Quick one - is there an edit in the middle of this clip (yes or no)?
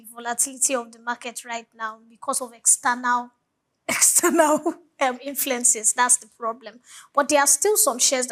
no